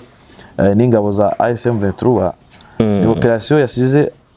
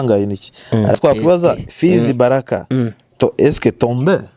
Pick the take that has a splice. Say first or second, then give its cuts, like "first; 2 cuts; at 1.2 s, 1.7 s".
second; 1 cut; at 0.9 s